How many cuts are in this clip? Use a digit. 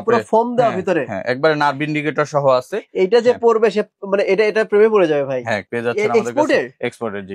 1